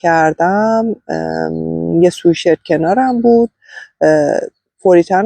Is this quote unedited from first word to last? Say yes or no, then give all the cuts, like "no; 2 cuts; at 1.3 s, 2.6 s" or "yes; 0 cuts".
yes; 0 cuts